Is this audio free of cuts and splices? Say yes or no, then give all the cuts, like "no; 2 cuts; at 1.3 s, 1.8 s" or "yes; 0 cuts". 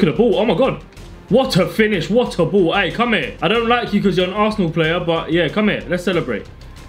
no; 1 cut; at 3.3 s